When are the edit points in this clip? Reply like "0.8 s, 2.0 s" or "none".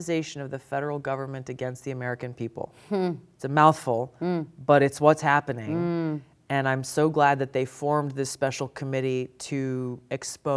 none